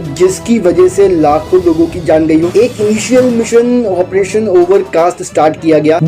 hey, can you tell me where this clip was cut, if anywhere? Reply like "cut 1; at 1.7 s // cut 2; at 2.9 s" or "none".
cut 1; at 2.5 s